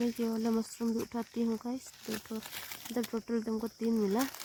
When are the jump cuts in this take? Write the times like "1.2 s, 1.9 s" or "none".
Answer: none